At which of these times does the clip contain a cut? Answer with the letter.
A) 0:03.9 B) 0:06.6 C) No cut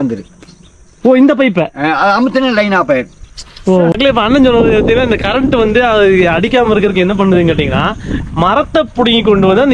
A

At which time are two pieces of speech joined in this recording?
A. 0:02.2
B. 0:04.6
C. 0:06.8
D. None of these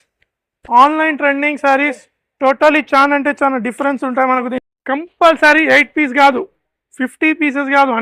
B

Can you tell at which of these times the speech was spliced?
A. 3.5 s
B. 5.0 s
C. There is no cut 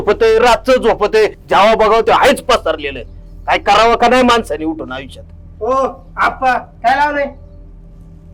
C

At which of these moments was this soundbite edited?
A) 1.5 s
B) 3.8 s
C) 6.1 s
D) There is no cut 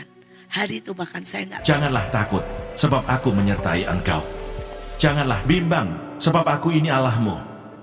A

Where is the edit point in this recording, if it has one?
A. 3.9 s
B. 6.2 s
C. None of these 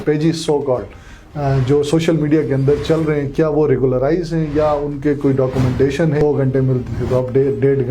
B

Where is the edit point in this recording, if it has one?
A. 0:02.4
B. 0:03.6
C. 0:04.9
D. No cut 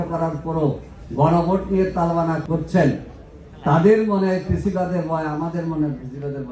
A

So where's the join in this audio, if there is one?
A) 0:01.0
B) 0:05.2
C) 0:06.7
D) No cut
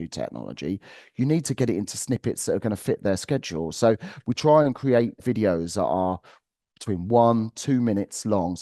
B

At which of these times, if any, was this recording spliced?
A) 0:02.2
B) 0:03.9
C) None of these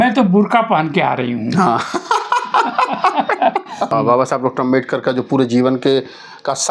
B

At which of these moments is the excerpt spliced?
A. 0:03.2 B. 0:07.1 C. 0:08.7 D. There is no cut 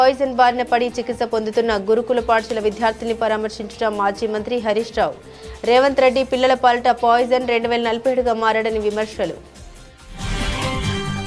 D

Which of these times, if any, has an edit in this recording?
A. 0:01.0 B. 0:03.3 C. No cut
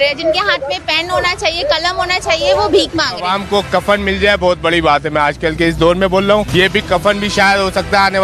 B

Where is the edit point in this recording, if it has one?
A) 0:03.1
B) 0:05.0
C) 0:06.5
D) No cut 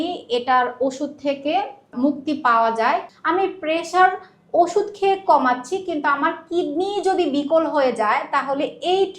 A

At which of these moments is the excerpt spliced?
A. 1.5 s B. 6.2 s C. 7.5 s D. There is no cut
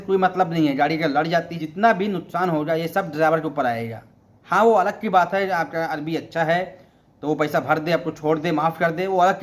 A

